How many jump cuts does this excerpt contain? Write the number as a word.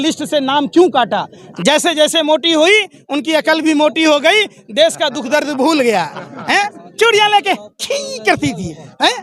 one